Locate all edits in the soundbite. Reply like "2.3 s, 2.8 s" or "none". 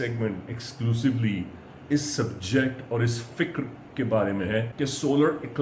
4.7 s